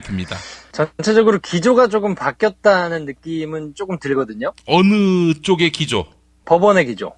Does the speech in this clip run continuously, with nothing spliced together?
yes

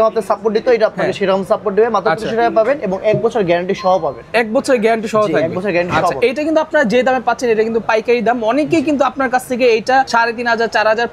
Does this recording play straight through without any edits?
yes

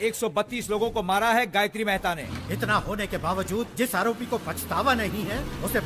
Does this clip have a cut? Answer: yes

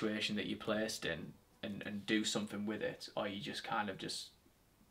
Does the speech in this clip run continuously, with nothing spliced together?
yes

